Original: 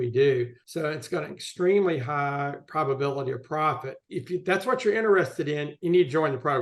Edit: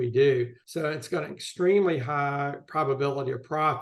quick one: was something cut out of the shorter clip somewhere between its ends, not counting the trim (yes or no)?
no